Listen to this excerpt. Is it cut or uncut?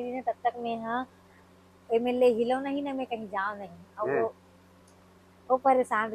uncut